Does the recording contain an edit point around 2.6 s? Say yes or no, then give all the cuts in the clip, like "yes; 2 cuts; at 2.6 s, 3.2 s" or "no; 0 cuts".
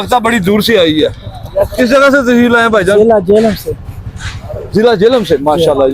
no; 0 cuts